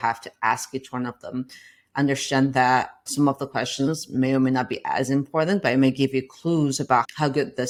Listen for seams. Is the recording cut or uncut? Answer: uncut